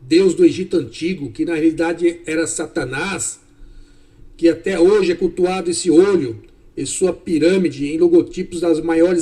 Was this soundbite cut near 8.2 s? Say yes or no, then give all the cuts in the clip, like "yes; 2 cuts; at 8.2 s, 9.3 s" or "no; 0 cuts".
no; 1 cut; at 5.6 s